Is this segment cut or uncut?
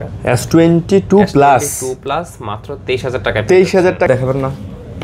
cut